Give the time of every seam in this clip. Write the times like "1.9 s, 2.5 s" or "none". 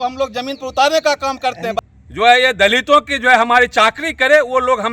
1.7 s